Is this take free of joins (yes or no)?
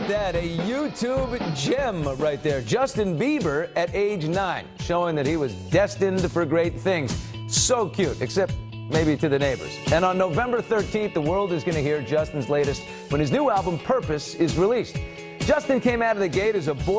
no